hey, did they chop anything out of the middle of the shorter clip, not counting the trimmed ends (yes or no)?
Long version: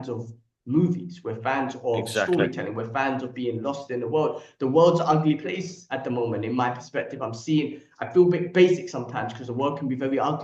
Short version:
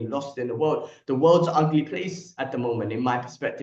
no